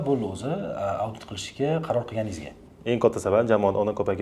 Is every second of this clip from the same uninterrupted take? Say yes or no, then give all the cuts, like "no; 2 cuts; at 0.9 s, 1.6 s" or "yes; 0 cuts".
yes; 0 cuts